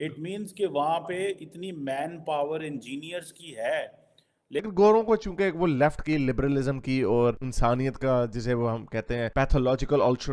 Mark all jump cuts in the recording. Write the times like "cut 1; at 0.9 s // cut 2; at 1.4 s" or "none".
cut 1; at 4.6 s